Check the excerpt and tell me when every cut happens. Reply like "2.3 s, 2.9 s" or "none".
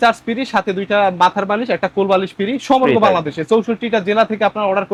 none